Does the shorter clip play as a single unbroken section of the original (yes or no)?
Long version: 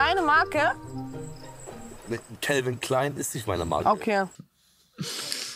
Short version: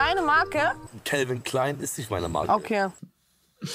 no